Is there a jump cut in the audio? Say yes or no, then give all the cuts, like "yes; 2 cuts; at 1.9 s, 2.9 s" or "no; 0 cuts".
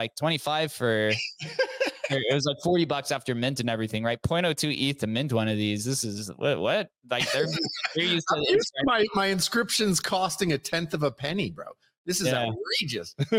no; 0 cuts